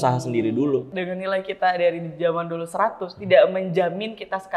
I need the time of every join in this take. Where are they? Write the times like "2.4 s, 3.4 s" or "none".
0.9 s